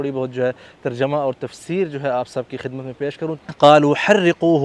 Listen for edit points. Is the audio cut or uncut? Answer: cut